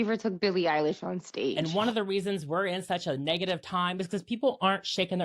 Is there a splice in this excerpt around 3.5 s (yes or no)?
no